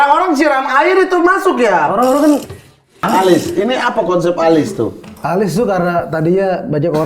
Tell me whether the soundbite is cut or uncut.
cut